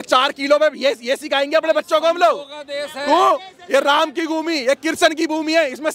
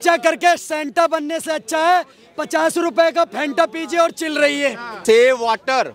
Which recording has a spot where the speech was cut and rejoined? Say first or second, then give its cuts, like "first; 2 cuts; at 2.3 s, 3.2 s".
second; 1 cut; at 4.9 s